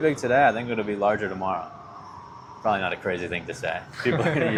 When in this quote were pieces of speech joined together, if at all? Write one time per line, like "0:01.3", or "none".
none